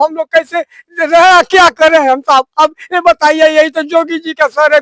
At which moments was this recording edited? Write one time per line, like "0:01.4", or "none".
none